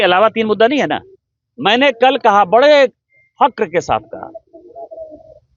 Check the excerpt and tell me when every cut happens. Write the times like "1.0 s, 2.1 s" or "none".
none